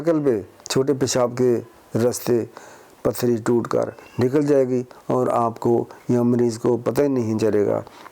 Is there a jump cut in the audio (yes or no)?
no